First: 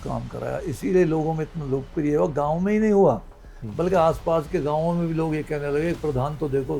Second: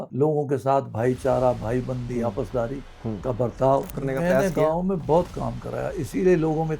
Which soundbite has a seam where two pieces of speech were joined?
second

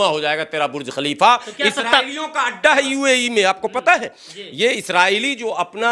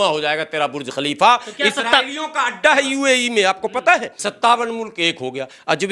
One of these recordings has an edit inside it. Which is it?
second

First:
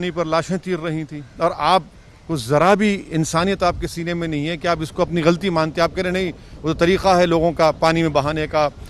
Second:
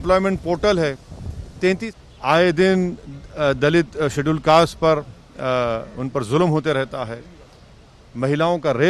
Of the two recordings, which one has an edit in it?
second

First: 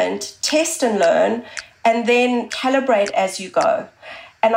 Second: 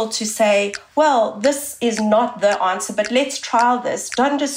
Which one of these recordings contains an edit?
first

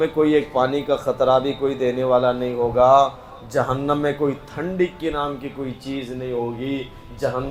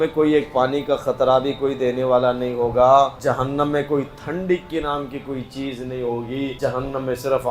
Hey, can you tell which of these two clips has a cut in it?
second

